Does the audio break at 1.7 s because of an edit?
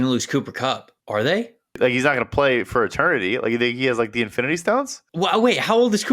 yes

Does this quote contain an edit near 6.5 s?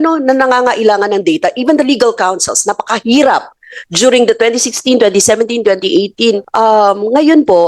yes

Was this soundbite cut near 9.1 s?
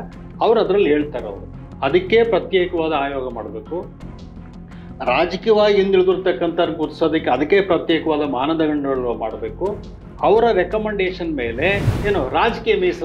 no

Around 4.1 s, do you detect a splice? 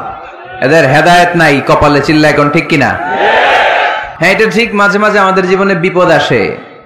yes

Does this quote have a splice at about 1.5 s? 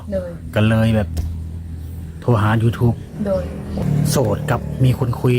no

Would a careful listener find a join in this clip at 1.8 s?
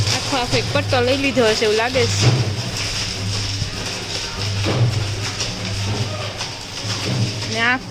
no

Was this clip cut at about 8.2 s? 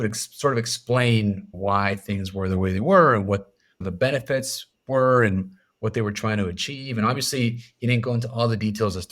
no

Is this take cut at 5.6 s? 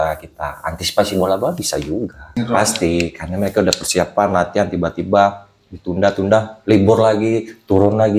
no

